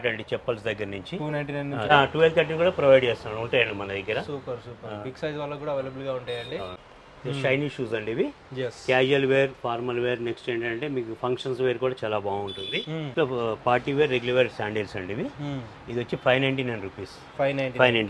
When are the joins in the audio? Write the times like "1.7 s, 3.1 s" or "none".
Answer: 1.9 s, 6.9 s, 13.1 s